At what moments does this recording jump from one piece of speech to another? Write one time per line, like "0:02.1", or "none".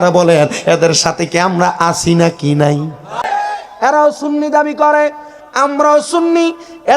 0:03.1